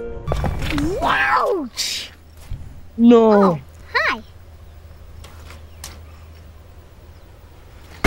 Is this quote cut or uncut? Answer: uncut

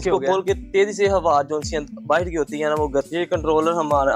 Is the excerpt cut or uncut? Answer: cut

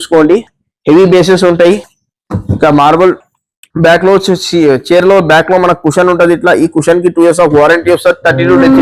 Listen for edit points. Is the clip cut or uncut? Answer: uncut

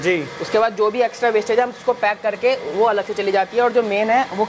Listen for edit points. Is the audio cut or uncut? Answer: uncut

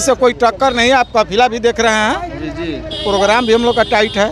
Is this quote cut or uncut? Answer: uncut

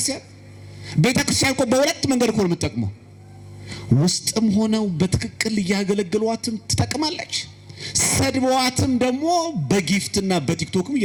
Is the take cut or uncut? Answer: uncut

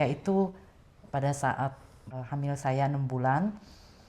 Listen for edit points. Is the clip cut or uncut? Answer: cut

